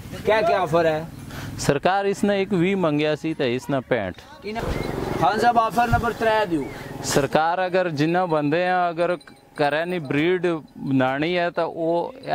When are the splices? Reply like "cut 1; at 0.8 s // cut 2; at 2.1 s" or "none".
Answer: cut 1; at 4.5 s